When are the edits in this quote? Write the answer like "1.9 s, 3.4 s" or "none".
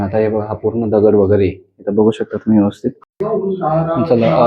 3.1 s